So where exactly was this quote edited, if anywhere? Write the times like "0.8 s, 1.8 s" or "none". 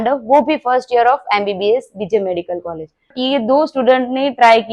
3.1 s